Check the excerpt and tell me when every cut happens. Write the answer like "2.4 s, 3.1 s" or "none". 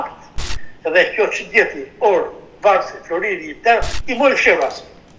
3.9 s